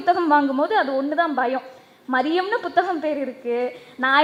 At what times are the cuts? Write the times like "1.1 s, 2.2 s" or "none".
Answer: none

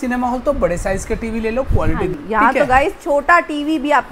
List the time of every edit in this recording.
2.1 s

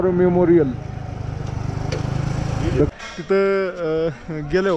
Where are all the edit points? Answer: 2.9 s

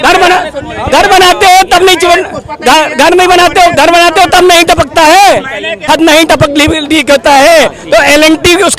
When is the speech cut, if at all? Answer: 5.8 s

